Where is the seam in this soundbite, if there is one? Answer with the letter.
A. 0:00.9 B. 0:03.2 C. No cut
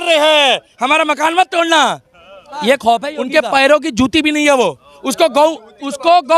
B